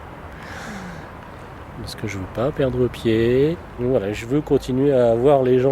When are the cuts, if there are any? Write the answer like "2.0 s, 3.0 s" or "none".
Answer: 3.7 s

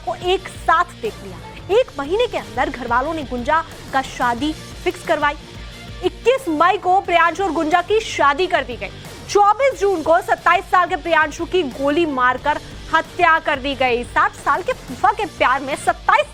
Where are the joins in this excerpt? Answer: none

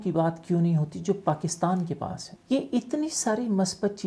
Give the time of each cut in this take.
2.2 s

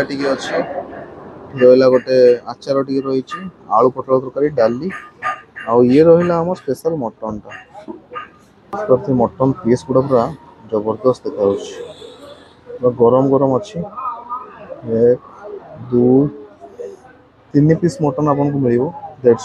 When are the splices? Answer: 8.8 s

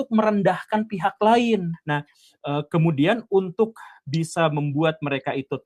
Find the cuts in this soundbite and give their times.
2.1 s

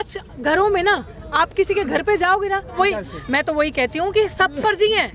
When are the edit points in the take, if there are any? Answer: 2.8 s

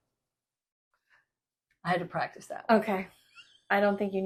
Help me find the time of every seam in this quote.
none

